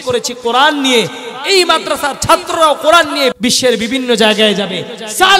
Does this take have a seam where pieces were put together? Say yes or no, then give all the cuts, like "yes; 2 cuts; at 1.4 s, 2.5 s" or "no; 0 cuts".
yes; 1 cut; at 3.3 s